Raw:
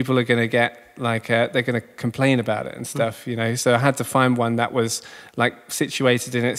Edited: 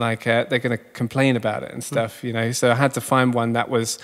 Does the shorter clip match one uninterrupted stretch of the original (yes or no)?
yes